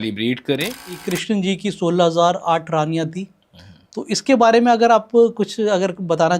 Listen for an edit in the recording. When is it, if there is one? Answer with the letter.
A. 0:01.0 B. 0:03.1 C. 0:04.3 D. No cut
A